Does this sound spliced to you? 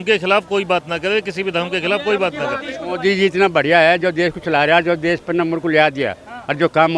yes; 1 cut; at 2.7 s

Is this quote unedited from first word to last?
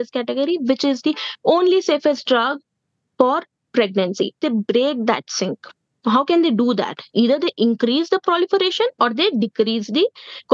no; 1 cut; at 4.3 s

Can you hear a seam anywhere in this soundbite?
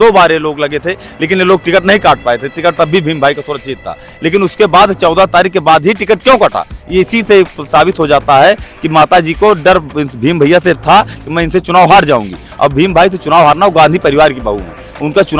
no; 0 cuts

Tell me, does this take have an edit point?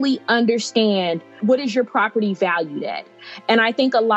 yes; 1 cut; at 1.4 s

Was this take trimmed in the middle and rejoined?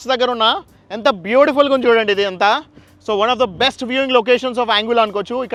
no; 0 cuts

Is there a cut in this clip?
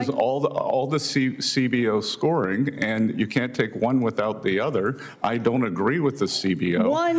no; 0 cuts

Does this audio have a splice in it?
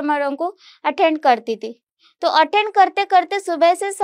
no; 0 cuts

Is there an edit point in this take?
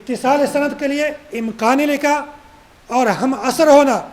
no; 0 cuts

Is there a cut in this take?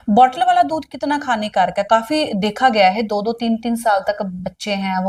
no; 0 cuts

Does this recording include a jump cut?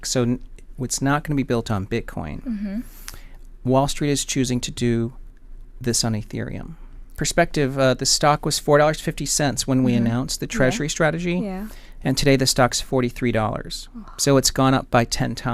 yes; 1 cut; at 7.2 s

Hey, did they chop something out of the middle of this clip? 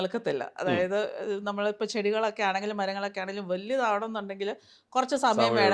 no; 0 cuts

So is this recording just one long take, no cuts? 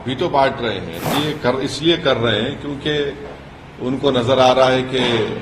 no; 1 cut; at 1.1 s

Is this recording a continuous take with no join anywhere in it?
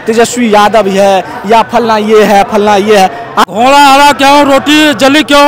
no; 1 cut; at 3.5 s

